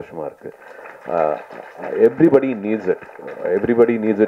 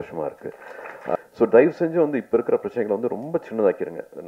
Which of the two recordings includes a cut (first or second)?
second